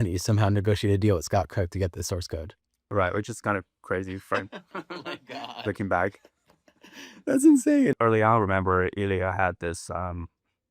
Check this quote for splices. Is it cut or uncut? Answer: cut